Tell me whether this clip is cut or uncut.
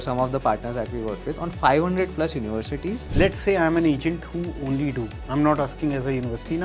cut